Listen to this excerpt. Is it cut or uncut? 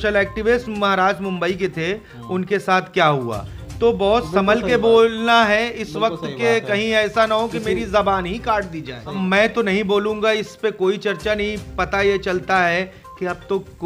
cut